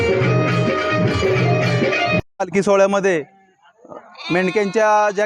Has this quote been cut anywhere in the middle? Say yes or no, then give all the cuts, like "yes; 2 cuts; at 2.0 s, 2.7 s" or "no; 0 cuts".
yes; 1 cut; at 2.2 s